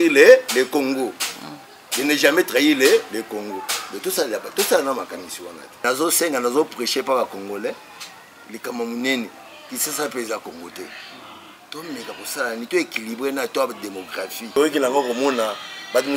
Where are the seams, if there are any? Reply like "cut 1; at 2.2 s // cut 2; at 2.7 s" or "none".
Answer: cut 1; at 5.8 s // cut 2; at 14.6 s